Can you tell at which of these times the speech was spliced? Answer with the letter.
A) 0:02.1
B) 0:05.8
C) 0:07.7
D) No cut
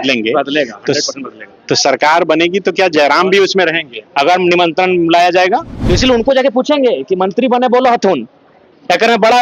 B